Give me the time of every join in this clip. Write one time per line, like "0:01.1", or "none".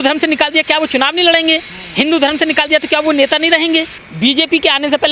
0:04.0